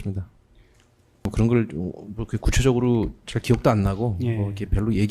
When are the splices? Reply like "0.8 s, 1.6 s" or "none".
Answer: 1.3 s